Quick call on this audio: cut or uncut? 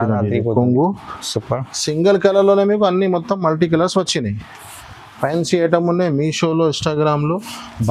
uncut